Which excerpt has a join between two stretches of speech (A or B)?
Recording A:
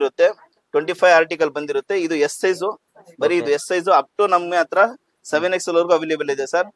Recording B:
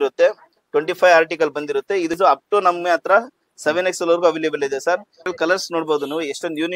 B